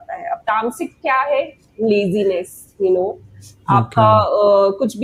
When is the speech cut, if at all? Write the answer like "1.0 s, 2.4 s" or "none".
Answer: none